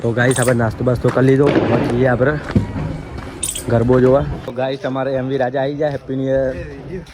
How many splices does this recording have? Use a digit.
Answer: 1